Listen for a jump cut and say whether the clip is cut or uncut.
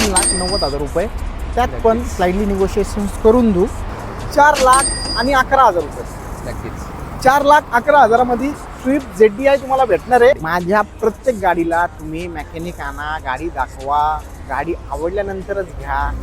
cut